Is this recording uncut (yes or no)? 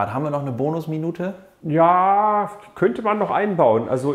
no